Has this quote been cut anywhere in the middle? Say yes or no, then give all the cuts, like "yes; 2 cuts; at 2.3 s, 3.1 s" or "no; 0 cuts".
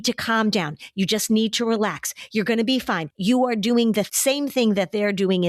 yes; 2 cuts; at 3.1 s, 4.1 s